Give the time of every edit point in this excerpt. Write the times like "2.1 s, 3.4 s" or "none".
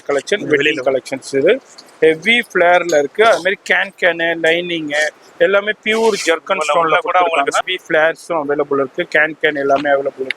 7.6 s